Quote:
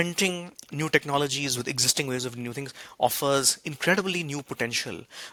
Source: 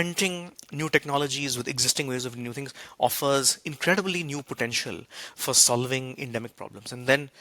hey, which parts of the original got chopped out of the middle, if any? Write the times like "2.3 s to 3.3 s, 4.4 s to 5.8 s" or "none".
none